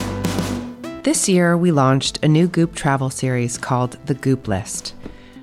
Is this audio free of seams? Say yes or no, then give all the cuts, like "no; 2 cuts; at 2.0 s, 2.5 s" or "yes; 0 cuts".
no; 1 cut; at 1.0 s